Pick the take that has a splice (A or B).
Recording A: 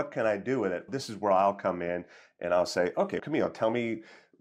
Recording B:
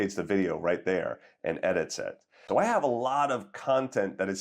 B